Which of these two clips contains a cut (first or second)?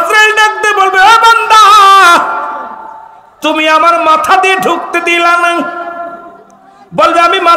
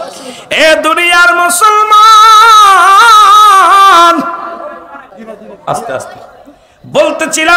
second